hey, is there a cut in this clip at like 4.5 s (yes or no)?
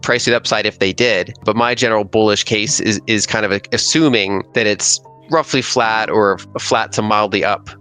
yes